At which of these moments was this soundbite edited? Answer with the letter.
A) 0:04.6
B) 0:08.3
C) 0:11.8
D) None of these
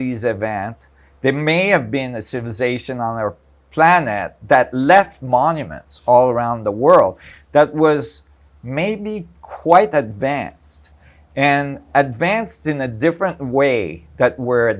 D